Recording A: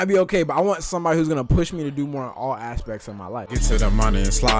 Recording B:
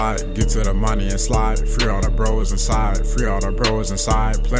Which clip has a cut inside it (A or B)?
A